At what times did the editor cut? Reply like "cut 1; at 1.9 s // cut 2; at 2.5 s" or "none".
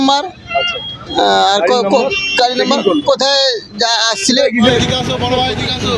cut 1; at 4.7 s